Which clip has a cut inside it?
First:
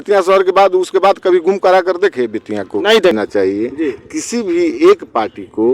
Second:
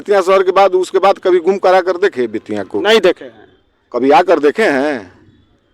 first; 1 cut; at 3.2 s

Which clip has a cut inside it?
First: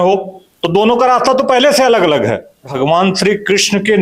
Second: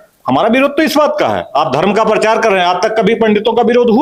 first; 1 cut; at 2.7 s

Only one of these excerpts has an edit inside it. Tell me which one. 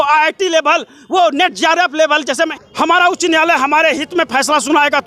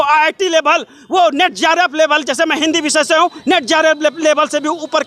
first; 1 cut; at 2.5 s

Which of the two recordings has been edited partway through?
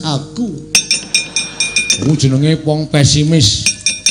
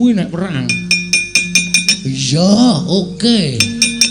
first; 1 cut; at 1.7 s

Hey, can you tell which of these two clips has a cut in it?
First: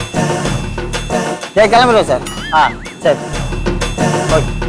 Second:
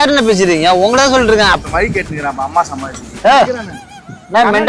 second; 2 cuts; at 1.6 s, 3.0 s

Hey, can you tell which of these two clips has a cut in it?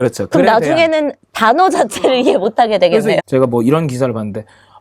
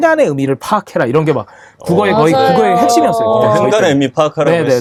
first; 1 cut; at 3.2 s

